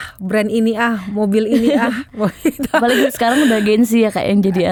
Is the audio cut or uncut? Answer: uncut